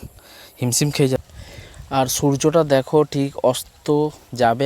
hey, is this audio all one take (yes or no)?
no